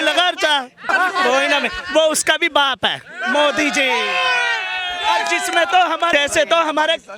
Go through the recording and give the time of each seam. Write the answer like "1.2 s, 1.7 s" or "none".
0.9 s, 6.1 s